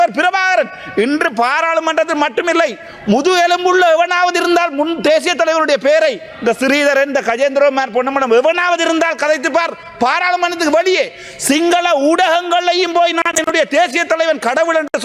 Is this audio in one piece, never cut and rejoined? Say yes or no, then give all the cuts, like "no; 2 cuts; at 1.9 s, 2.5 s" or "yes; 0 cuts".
yes; 0 cuts